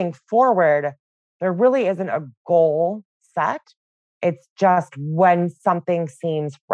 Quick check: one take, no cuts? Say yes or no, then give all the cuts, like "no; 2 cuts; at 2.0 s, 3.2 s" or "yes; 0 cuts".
yes; 0 cuts